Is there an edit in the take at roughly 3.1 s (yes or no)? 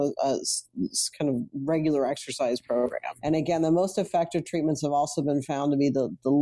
yes